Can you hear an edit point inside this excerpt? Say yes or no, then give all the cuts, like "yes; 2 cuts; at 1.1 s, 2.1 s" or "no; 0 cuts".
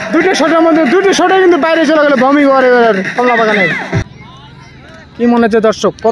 yes; 1 cut; at 4.1 s